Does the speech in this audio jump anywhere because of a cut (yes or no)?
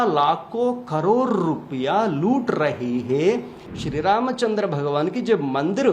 yes